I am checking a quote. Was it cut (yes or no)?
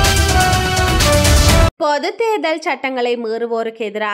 yes